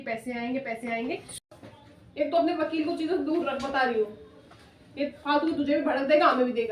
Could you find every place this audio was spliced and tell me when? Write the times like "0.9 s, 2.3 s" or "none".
1.3 s